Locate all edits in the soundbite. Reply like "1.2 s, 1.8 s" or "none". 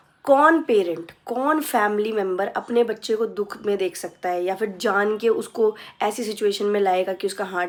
none